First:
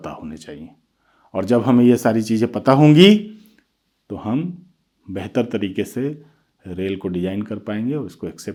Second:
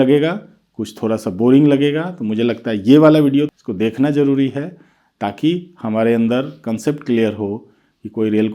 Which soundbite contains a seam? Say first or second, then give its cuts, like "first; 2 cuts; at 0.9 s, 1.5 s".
second; 1 cut; at 3.6 s